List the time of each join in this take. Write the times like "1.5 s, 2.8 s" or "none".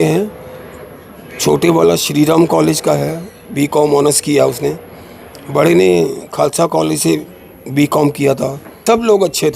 8.7 s